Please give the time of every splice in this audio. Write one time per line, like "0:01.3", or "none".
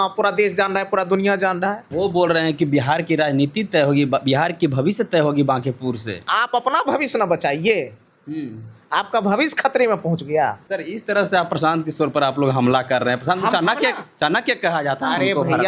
0:01.9
0:06.3
0:10.6